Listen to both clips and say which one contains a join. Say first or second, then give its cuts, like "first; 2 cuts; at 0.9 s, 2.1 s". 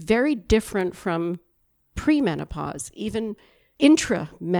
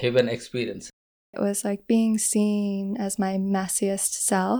second; 1 cut; at 1.4 s